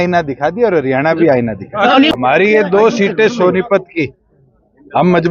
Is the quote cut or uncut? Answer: cut